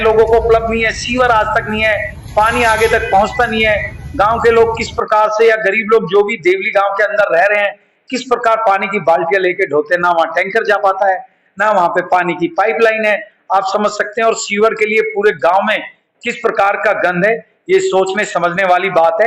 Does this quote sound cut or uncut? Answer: uncut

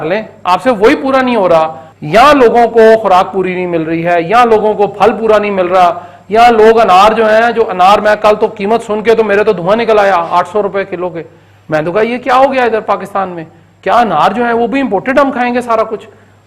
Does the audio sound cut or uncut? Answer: cut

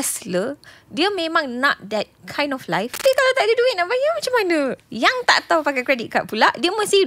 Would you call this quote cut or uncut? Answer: cut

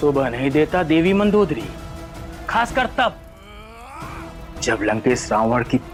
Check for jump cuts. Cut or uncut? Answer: uncut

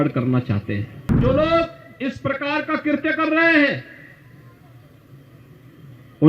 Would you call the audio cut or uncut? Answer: cut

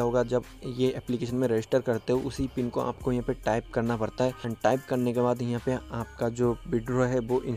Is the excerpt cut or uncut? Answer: cut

